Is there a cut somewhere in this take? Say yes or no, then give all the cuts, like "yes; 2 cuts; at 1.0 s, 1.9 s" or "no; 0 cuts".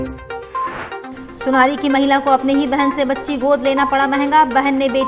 no; 0 cuts